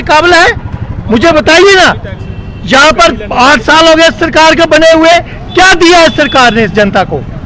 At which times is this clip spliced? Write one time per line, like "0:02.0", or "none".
none